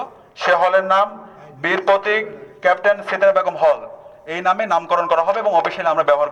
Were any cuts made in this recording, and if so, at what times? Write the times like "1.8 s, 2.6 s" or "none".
none